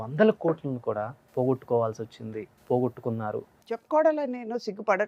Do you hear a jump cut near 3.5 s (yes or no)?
yes